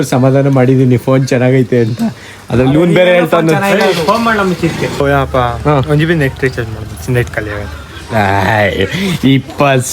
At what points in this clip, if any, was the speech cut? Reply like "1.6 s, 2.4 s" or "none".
5.0 s